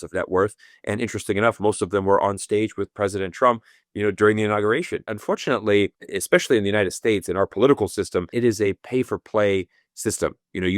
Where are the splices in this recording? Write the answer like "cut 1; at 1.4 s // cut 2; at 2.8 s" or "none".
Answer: cut 1; at 5.1 s // cut 2; at 6.1 s // cut 3; at 8.3 s